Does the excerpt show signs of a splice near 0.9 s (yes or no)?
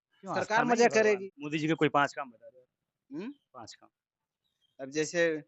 yes